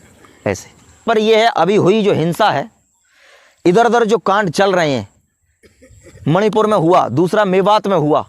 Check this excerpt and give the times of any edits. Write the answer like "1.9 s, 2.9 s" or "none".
1.0 s

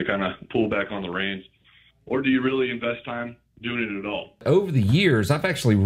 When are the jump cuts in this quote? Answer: 4.4 s

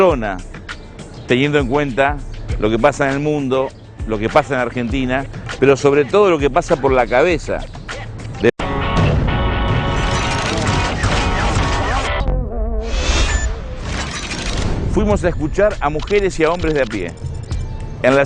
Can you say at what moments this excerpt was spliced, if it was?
none

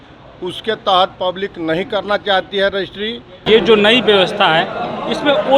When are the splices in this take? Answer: 3.4 s

